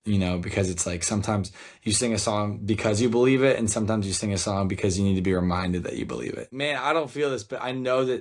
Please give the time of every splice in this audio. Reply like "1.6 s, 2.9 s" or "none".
6.4 s